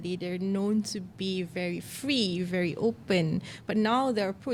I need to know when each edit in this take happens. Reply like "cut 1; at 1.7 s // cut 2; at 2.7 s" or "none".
none